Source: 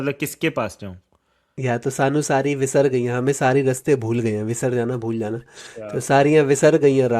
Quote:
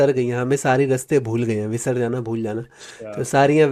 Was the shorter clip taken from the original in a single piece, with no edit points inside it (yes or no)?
yes